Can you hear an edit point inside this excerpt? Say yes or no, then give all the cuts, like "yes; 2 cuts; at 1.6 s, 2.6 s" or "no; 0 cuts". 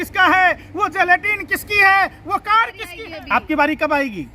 yes; 1 cut; at 2.8 s